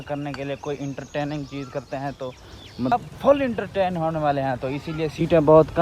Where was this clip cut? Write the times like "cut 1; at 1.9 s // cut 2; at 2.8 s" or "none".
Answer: cut 1; at 2.9 s

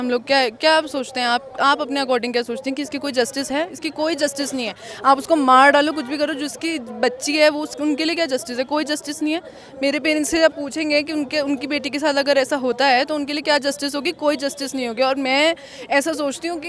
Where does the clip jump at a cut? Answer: none

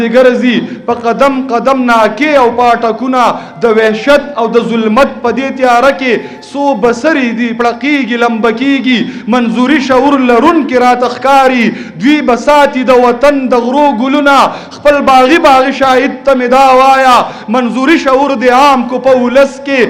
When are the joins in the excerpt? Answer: none

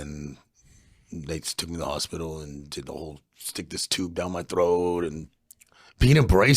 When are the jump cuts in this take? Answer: cut 1; at 5.2 s

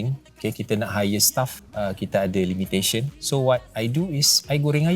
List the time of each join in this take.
cut 1; at 1.6 s // cut 2; at 3.2 s

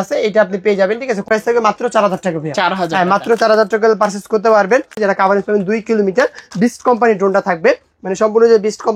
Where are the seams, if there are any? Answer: cut 1; at 1.3 s // cut 2; at 5.0 s

